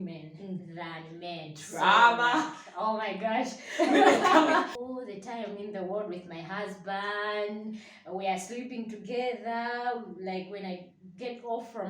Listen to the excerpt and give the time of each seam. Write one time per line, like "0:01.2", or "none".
0:04.8